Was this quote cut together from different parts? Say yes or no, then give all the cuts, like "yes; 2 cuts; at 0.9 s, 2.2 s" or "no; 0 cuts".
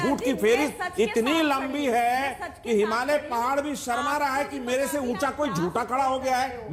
no; 0 cuts